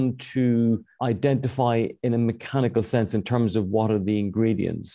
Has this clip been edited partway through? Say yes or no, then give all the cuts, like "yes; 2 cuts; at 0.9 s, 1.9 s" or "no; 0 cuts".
no; 0 cuts